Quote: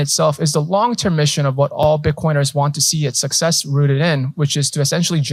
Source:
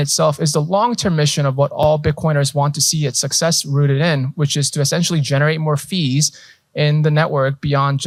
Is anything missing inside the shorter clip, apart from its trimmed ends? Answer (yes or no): no